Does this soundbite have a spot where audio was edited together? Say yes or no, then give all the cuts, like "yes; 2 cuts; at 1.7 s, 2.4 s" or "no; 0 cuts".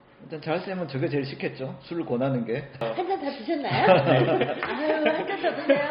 yes; 1 cut; at 2.8 s